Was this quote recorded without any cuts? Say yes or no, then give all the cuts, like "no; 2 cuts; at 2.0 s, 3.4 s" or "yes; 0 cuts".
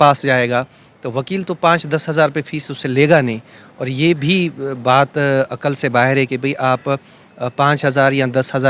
yes; 0 cuts